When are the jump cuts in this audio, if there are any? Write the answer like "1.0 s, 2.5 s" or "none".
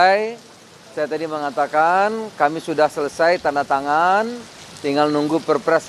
none